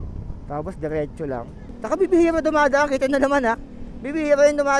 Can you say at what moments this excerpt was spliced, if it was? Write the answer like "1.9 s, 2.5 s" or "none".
1.6 s